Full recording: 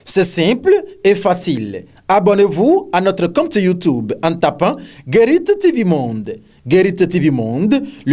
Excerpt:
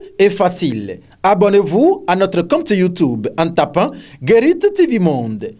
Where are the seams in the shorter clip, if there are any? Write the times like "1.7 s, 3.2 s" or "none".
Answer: none